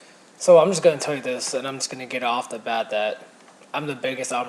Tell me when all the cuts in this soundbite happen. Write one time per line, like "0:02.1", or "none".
0:02.0